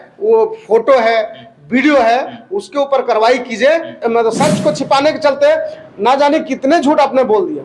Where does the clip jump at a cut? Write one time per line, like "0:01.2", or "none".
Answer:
0:04.0